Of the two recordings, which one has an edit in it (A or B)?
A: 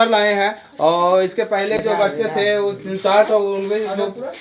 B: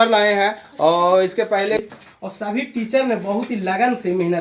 B